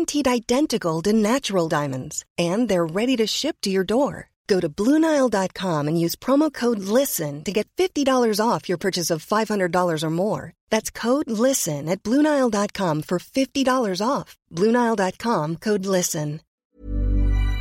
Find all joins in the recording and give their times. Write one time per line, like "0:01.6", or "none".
0:16.5